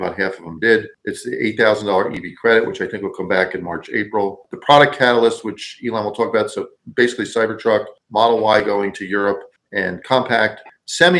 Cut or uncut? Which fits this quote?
cut